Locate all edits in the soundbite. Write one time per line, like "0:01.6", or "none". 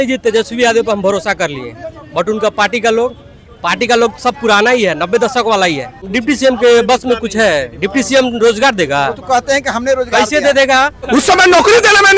0:06.0
0:11.0